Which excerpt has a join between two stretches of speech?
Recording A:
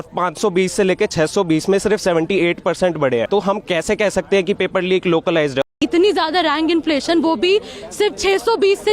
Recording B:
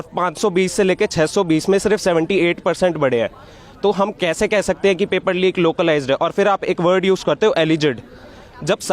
A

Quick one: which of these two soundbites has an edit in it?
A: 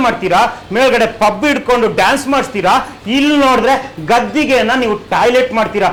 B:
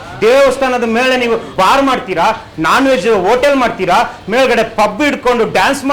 B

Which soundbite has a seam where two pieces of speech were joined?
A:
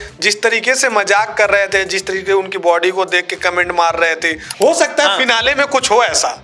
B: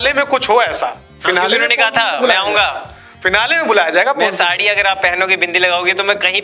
A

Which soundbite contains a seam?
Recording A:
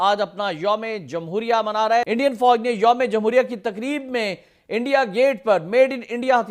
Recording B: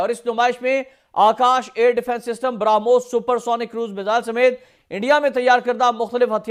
A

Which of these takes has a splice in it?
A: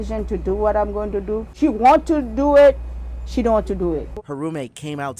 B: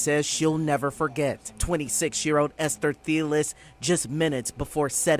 A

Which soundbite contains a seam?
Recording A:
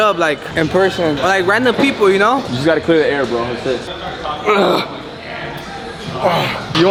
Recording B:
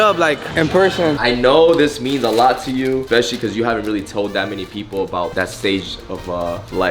B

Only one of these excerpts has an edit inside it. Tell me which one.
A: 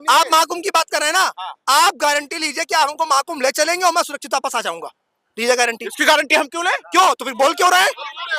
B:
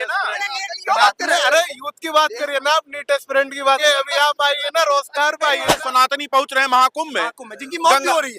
B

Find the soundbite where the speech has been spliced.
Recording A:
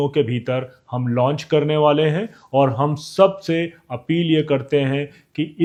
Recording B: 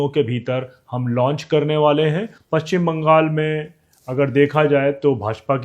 B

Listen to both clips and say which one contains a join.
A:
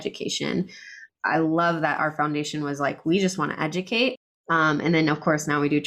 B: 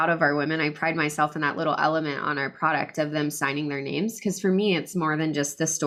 A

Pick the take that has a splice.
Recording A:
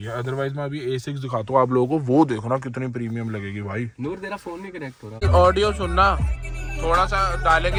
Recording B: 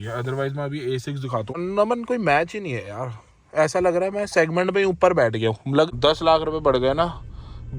B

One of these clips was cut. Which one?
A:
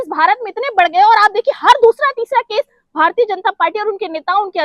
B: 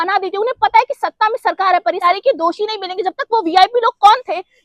B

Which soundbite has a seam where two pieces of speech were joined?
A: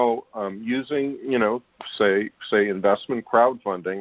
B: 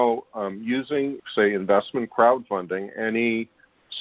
B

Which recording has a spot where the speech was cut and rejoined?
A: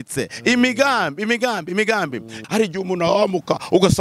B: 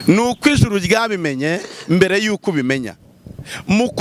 A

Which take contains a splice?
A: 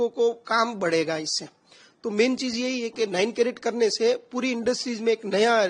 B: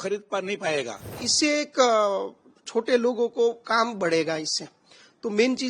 B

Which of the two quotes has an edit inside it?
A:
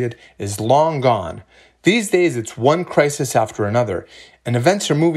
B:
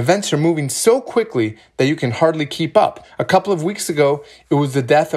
B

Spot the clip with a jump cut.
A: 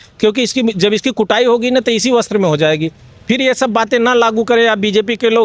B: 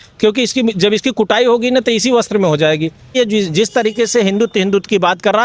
B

